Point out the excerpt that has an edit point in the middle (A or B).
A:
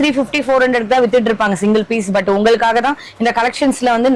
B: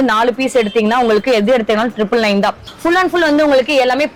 B